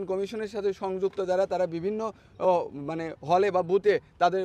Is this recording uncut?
yes; 0 cuts

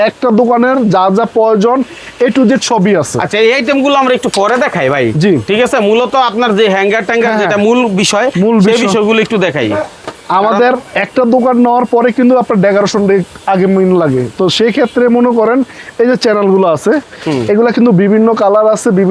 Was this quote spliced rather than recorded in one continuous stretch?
no; 0 cuts

